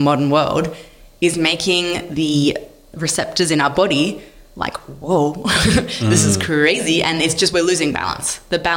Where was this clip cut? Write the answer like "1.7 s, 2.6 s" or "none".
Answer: none